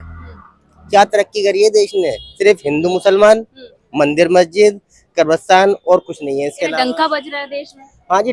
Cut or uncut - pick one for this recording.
uncut